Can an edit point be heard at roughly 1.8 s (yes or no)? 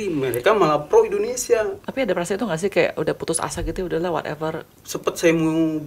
yes